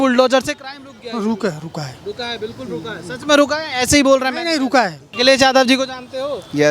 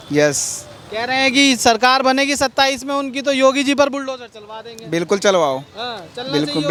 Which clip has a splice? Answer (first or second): first